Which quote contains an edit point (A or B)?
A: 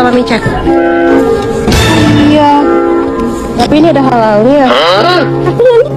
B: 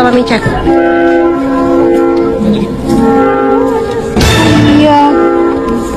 A